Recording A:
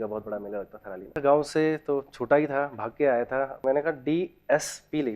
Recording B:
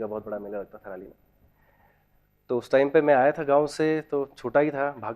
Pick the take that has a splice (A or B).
A